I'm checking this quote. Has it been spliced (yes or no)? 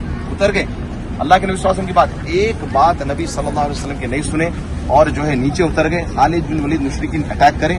no